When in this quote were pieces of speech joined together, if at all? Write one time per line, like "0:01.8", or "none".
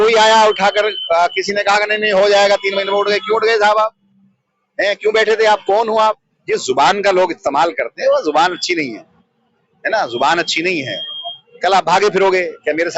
0:06.3